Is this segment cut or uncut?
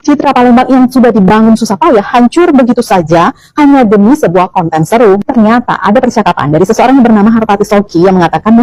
uncut